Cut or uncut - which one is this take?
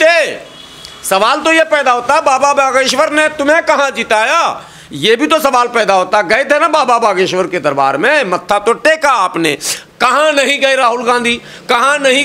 uncut